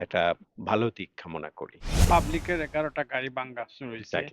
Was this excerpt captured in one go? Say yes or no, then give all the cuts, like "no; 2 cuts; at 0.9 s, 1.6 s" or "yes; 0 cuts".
no; 1 cut; at 1.9 s